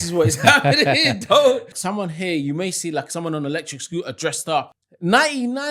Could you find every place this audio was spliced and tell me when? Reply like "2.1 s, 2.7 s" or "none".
1.7 s, 4.7 s